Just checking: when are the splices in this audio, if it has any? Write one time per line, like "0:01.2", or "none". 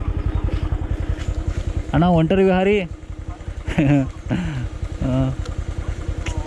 none